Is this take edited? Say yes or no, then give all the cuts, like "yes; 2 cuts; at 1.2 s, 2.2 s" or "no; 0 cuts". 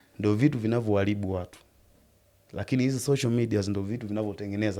no; 0 cuts